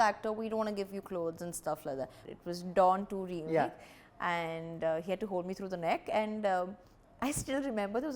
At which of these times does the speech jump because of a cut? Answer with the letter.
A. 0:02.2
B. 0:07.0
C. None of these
A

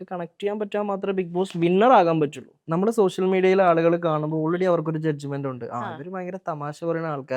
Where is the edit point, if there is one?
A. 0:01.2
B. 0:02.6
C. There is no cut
B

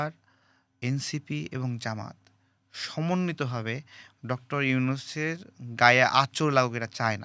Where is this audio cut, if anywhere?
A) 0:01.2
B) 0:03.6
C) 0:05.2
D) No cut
D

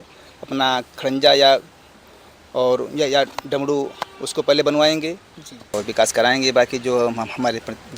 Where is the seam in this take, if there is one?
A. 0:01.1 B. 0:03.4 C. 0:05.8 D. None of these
C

